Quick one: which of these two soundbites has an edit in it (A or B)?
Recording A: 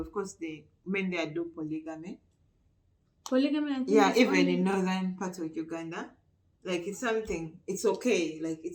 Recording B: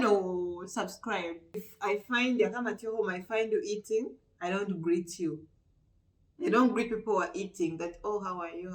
B